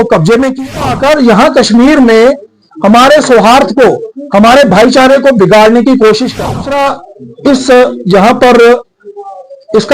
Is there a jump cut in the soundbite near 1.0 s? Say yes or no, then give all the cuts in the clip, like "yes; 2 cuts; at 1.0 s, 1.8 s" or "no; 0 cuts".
yes; 2 cuts; at 1.0 s, 6.6 s